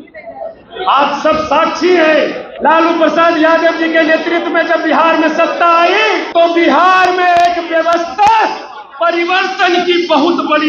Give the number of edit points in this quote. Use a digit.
2